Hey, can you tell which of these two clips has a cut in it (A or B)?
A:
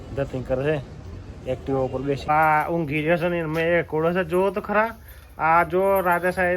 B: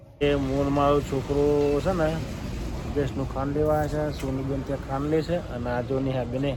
A